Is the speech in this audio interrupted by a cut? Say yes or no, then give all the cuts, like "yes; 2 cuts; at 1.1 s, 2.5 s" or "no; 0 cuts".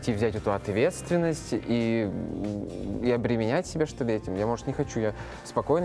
no; 0 cuts